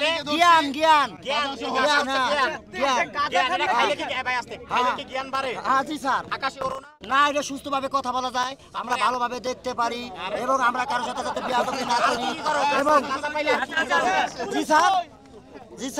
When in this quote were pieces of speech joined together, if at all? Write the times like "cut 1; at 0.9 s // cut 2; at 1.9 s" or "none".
none

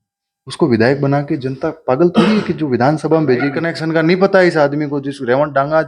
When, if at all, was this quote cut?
cut 1; at 3.7 s

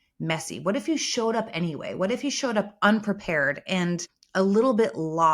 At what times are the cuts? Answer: cut 1; at 4.1 s

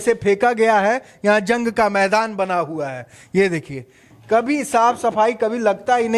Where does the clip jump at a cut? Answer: none

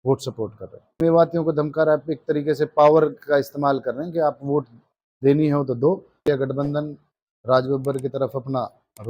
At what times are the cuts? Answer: cut 1; at 1.0 s // cut 2; at 6.2 s

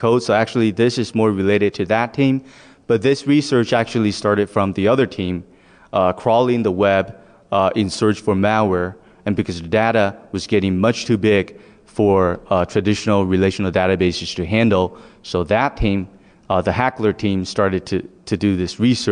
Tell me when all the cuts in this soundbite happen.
cut 1; at 17.7 s

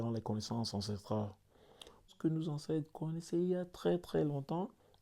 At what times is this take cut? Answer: cut 1; at 2.1 s

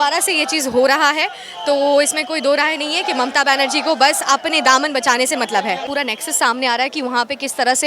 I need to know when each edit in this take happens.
cut 1; at 5.9 s

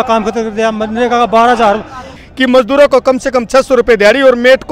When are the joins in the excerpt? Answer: cut 1; at 2.2 s

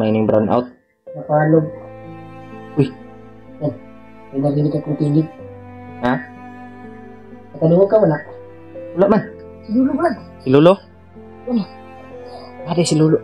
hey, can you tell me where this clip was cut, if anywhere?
cut 1; at 9.5 s

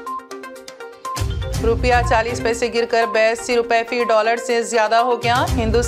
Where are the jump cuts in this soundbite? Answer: cut 1; at 1.4 s

